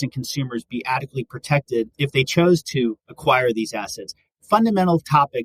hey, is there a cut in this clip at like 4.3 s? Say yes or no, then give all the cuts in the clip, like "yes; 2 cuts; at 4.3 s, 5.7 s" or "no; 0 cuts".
no; 2 cuts; at 1.9 s, 3.1 s